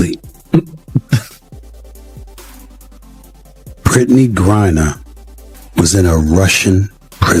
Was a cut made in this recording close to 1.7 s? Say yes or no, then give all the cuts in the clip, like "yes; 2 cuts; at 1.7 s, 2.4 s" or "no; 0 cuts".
no; 0 cuts